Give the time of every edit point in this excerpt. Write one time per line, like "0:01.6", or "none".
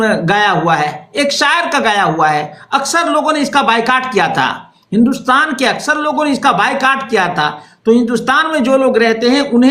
none